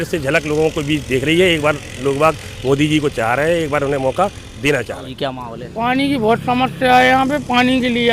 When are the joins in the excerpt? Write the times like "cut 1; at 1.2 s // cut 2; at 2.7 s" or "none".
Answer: cut 1; at 5.0 s